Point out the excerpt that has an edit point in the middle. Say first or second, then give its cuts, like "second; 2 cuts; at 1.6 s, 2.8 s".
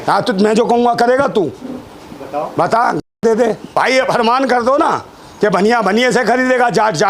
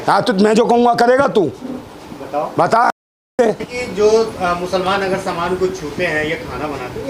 first; 1 cut; at 3.5 s